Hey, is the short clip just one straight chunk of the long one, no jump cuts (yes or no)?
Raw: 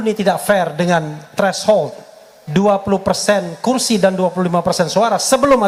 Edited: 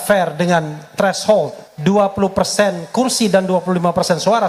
no